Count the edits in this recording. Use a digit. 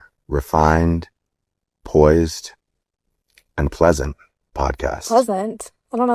0